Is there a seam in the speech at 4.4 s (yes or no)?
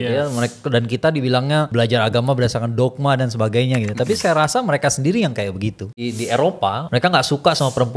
no